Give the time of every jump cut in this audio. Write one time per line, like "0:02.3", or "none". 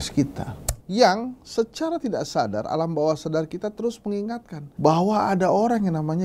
none